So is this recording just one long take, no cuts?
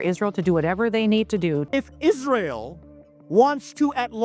no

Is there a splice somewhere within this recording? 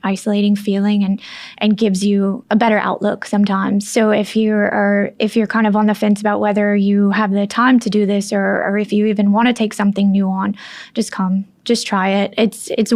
yes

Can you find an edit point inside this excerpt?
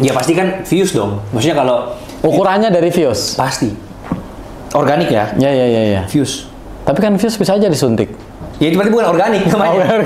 no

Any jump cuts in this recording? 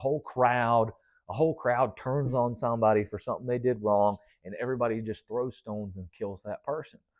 no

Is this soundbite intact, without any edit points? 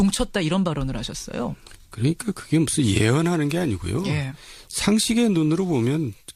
yes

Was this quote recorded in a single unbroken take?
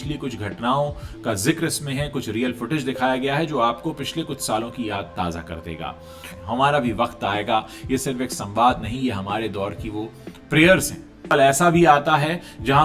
no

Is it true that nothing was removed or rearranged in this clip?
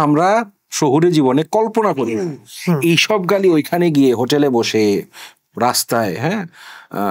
yes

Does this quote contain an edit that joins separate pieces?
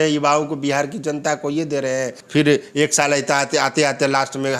yes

